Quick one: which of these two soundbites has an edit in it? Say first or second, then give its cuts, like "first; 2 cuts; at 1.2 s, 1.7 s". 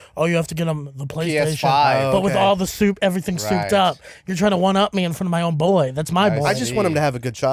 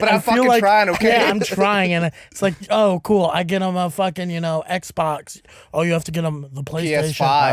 second; 1 cut; at 2.6 s